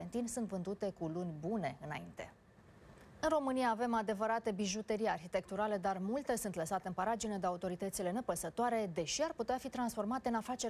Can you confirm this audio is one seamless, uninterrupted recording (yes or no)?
no